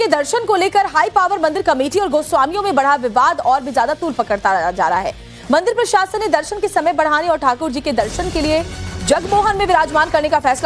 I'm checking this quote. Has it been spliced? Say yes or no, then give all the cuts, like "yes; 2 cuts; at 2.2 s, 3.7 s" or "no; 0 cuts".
no; 0 cuts